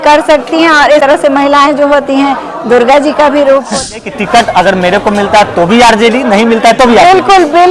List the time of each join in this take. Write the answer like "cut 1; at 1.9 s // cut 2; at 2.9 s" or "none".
cut 1; at 1.0 s // cut 2; at 3.9 s